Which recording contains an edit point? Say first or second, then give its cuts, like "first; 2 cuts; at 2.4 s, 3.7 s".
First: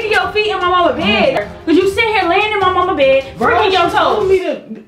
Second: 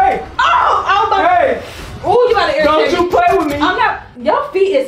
first; 1 cut; at 1.4 s